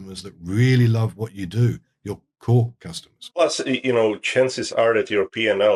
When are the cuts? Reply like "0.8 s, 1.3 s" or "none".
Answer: none